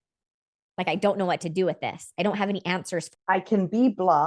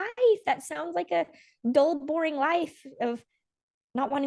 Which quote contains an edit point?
first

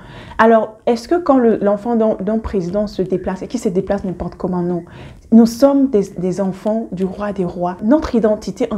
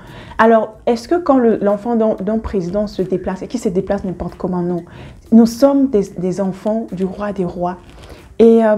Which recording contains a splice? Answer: first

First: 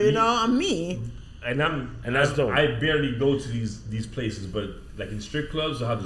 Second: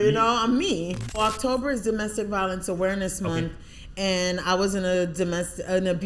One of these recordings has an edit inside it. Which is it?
second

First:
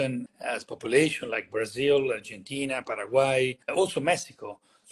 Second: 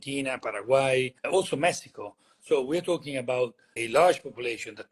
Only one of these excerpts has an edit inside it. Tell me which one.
second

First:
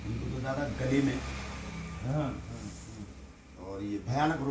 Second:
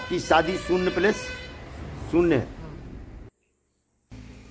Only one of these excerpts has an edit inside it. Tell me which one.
second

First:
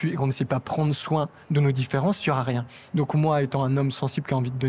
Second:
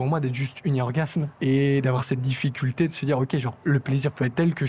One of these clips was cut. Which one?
second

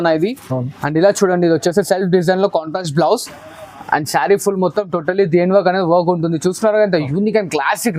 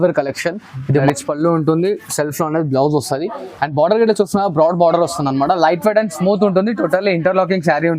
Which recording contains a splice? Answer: second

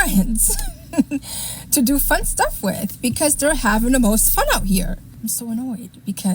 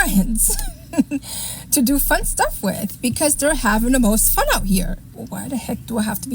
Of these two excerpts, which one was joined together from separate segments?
second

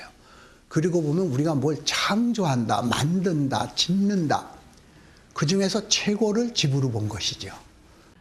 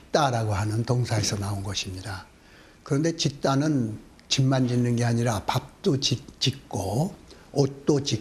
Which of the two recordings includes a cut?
first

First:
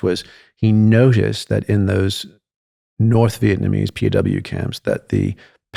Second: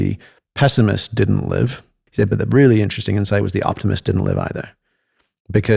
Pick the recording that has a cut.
second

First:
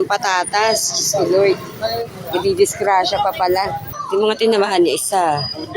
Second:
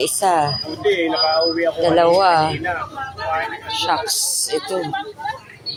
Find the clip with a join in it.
first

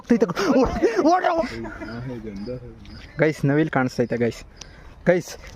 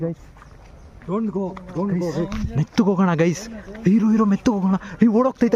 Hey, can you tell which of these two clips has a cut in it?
first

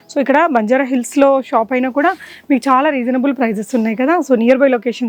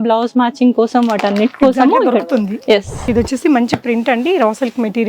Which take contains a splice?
second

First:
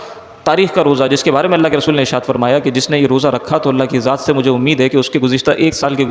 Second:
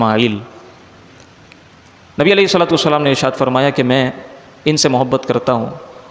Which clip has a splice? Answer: second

